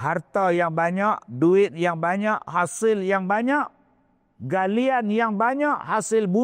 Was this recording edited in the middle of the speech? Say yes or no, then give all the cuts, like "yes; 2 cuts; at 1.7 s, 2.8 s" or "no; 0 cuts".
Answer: no; 0 cuts